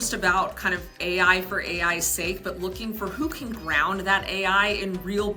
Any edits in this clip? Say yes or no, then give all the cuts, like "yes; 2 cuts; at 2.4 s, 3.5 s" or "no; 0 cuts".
no; 0 cuts